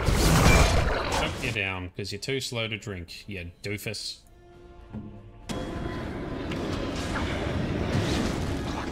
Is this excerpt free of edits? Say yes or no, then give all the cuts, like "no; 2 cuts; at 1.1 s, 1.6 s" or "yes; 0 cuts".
yes; 0 cuts